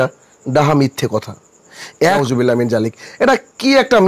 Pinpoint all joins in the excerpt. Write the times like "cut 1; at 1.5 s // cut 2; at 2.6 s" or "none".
cut 1; at 2.2 s